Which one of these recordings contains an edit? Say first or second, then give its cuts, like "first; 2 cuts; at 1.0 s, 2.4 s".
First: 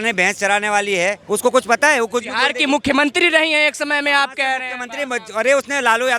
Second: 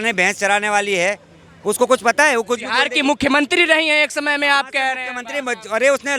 first; 1 cut; at 1.2 s